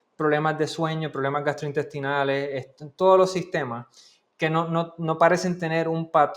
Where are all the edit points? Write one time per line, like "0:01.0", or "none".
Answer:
none